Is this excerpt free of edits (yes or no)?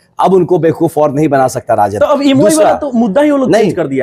yes